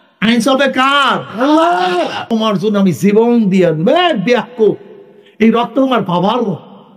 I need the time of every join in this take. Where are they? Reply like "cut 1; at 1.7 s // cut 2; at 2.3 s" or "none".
cut 1; at 2.2 s

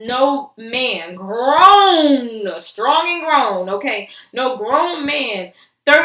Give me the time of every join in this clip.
none

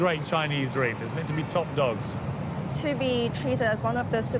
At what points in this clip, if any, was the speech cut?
none

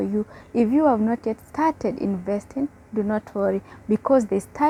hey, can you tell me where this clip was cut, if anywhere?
none

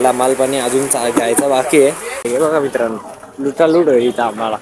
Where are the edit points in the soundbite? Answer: cut 1; at 2.2 s

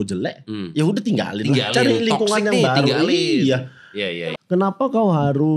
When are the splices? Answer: cut 1; at 4.1 s

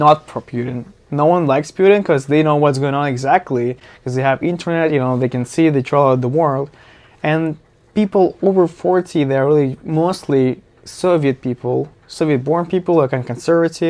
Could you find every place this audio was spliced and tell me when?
none

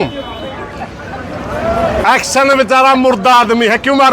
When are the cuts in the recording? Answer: none

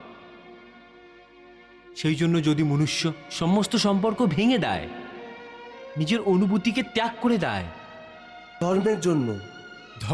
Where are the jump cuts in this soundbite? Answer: cut 1; at 8.6 s

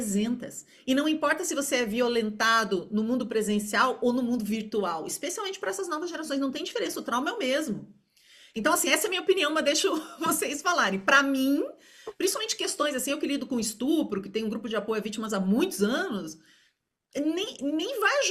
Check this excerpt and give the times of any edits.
none

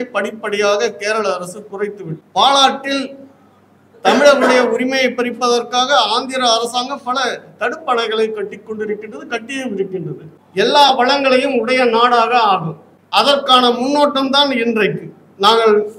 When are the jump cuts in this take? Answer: cut 1; at 2.2 s // cut 2; at 10.4 s

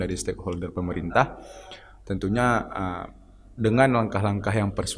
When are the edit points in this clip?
none

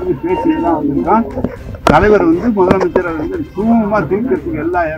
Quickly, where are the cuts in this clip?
none

